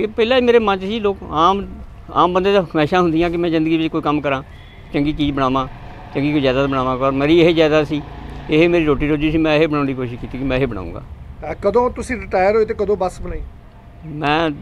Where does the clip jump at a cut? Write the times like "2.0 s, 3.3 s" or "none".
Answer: none